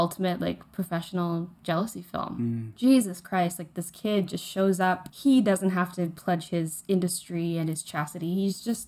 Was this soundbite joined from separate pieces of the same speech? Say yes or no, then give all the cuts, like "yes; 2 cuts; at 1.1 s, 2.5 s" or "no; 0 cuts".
yes; 2 cuts; at 2.7 s, 5.1 s